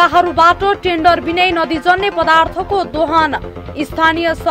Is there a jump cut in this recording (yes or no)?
no